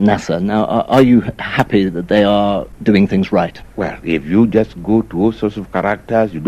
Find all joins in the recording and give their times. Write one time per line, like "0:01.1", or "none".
0:02.7
0:03.6

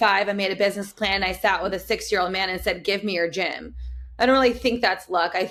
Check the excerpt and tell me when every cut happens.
none

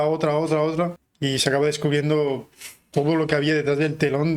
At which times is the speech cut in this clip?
0:01.1

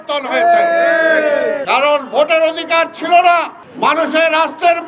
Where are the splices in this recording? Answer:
0:01.6
0:03.6

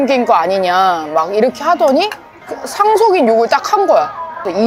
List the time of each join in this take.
none

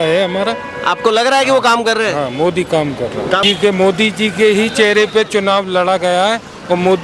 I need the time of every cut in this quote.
0:03.4

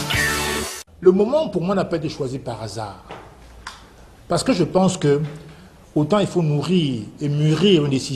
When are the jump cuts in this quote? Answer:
0:04.1

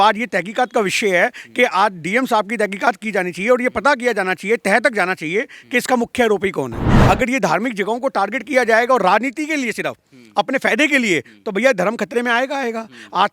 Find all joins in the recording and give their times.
0:06.9

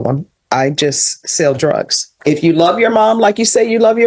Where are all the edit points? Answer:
0:02.1

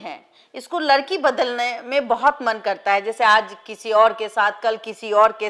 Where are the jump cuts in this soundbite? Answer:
none

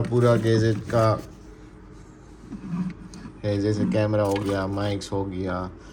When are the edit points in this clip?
none

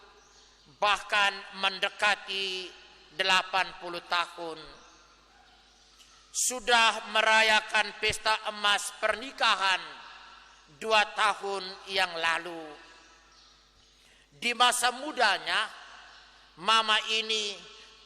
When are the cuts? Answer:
none

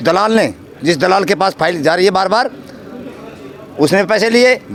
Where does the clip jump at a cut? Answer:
none

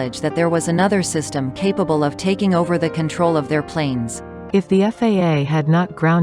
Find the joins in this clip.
0:04.3

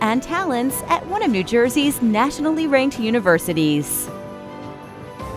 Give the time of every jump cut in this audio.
0:03.9

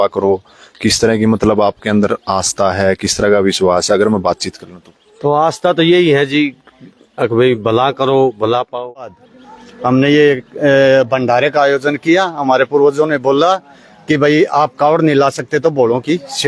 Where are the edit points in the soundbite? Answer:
0:09.1

